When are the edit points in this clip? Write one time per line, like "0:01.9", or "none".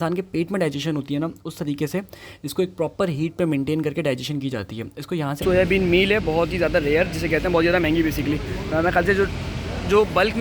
0:05.4